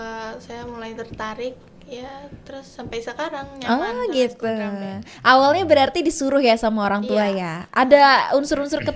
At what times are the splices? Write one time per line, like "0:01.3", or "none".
none